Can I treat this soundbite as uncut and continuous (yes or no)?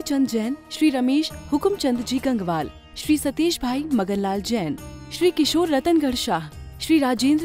yes